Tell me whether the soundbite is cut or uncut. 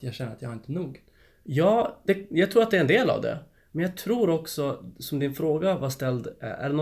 uncut